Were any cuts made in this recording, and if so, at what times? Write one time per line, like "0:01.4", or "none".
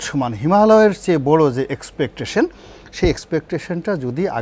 none